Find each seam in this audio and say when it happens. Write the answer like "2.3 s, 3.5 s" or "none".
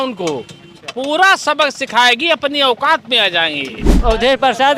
3.9 s